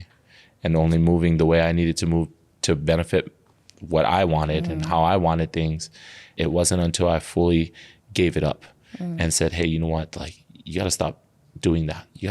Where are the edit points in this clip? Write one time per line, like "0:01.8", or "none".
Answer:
0:06.2